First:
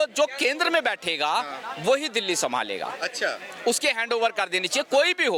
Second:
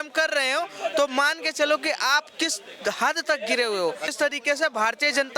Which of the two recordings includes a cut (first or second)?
second